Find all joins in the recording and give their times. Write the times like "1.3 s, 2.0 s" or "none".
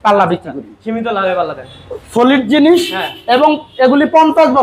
none